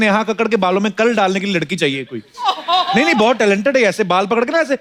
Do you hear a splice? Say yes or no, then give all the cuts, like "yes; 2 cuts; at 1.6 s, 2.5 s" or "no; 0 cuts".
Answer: no; 0 cuts